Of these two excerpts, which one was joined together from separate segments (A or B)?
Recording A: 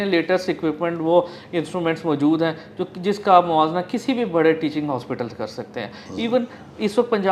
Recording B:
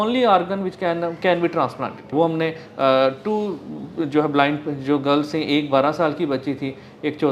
B